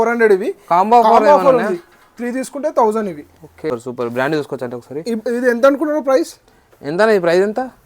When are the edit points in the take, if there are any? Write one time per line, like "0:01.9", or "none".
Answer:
0:03.7